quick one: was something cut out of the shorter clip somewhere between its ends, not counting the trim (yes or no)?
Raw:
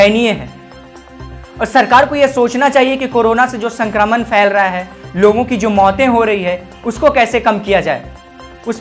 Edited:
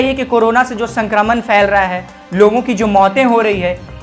no